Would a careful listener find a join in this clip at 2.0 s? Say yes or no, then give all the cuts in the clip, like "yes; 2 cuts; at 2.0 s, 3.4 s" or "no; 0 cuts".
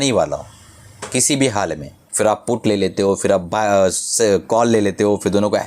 yes; 1 cut; at 2.0 s